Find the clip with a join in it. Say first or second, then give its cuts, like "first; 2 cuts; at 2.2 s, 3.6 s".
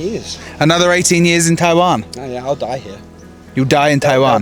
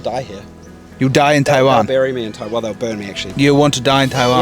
second; 1 cut; at 3.2 s